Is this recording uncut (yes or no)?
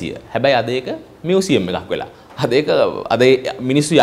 yes